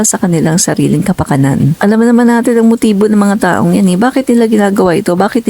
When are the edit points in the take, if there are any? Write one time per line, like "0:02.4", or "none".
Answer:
0:01.7